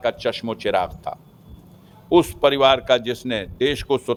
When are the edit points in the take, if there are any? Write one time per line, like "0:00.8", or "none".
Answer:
none